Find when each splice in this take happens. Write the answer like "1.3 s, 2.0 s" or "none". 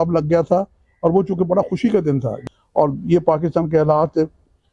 2.3 s